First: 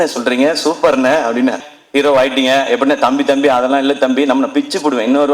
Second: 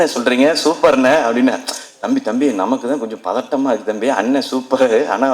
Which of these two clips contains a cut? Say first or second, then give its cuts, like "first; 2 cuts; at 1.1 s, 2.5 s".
first; 1 cut; at 1.7 s